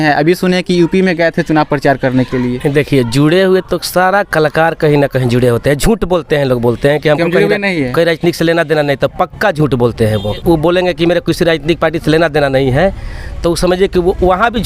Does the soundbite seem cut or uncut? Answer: cut